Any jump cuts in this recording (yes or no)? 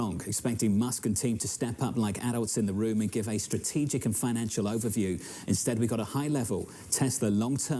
no